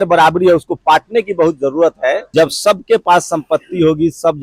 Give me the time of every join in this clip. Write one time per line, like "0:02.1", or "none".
0:02.2